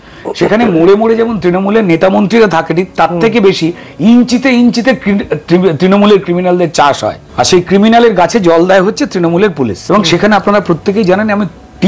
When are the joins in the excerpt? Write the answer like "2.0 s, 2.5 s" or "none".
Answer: 7.2 s, 9.8 s